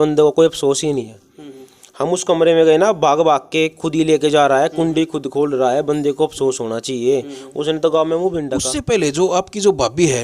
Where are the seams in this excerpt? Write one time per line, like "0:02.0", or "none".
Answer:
0:08.7